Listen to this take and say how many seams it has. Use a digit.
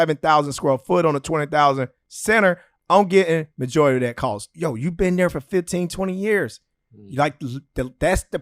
1